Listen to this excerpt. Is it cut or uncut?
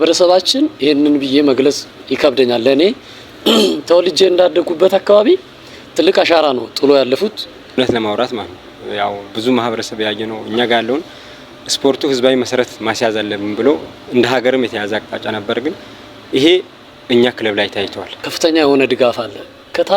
cut